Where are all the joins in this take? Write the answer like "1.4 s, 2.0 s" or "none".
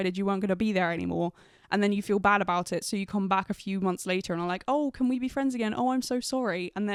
none

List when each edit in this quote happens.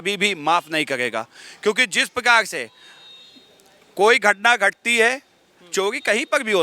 none

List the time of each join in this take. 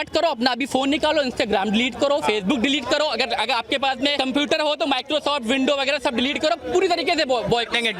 4.1 s

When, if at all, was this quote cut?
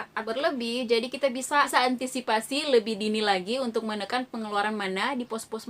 1.7 s

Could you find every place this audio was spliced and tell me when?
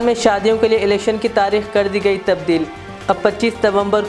none

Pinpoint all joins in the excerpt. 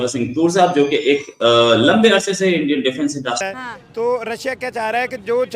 3.4 s

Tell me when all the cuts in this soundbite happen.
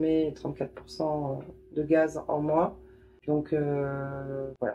none

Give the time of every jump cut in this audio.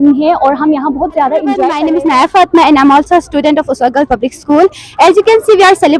1.7 s

